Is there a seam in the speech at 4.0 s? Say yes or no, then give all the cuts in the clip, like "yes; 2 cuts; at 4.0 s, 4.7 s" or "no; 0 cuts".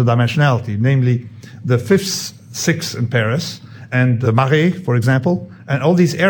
yes; 1 cut; at 4.0 s